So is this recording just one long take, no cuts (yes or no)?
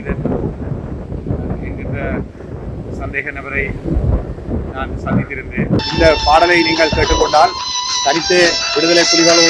no